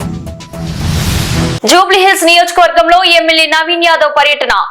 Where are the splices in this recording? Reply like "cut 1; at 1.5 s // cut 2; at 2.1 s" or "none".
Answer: cut 1; at 1.1 s